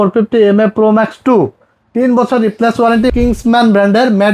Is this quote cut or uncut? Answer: cut